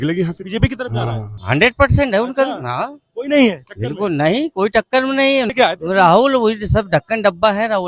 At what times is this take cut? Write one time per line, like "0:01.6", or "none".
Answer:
0:01.3
0:05.5